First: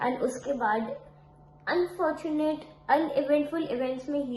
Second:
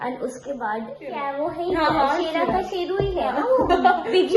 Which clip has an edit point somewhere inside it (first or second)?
second